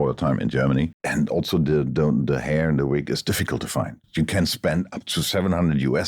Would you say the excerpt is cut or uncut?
cut